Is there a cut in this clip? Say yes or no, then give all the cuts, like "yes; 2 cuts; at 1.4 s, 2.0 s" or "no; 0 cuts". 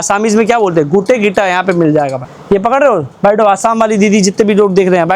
yes; 1 cut; at 2.3 s